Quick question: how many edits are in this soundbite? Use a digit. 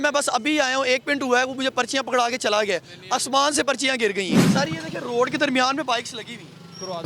1